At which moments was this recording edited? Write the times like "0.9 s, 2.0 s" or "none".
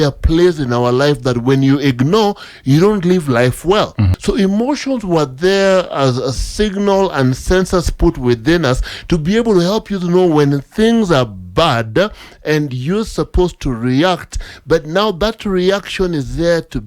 4.1 s